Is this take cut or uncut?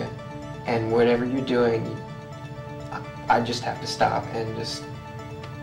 uncut